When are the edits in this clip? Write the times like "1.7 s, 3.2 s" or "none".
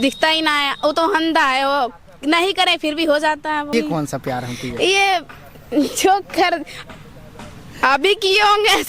3.7 s